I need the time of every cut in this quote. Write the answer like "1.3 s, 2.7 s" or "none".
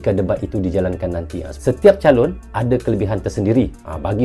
1.4 s